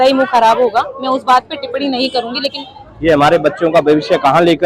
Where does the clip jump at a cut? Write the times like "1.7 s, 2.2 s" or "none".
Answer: 2.6 s